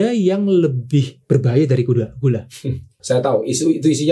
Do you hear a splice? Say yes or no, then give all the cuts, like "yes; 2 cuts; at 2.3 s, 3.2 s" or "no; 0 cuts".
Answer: yes; 2 cuts; at 1.1 s, 3.0 s